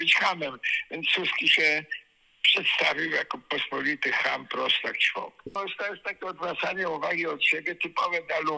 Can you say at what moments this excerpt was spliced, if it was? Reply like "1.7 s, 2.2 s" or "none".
5.6 s